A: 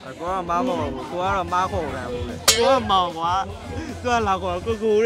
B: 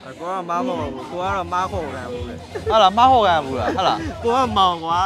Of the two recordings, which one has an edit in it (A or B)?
A